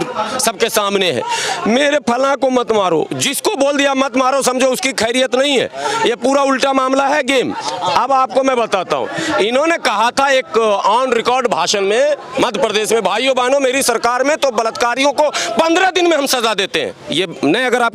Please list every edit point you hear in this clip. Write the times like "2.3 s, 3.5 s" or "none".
none